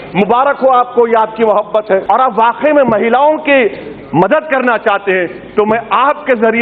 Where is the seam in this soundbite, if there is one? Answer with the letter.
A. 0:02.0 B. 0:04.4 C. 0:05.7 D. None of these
A